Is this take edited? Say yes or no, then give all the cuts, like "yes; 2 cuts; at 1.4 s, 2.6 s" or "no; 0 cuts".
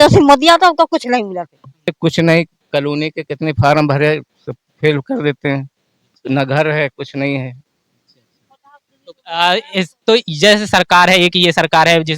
yes; 1 cut; at 2.0 s